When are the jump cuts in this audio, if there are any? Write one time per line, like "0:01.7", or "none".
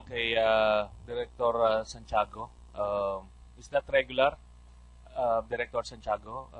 0:01.3